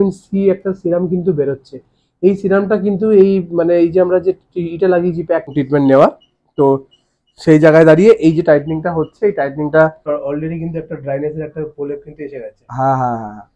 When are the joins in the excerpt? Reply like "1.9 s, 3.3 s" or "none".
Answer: 5.5 s, 10.1 s